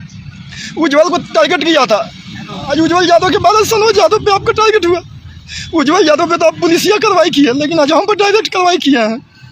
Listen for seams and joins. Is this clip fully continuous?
yes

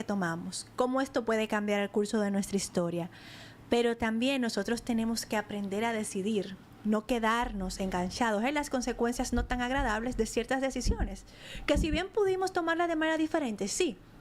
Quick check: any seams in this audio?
no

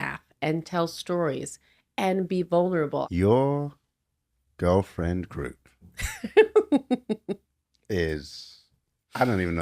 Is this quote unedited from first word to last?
no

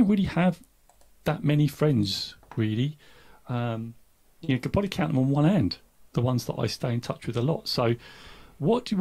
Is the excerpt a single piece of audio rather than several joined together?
yes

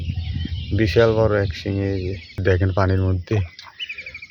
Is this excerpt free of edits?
no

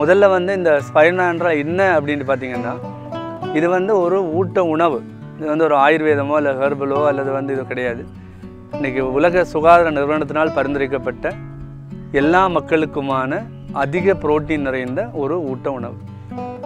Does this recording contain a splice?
no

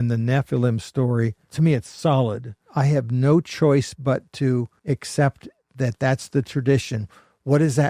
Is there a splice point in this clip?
yes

